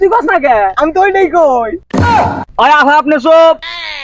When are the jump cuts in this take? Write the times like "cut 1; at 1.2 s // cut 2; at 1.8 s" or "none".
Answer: cut 1; at 2.4 s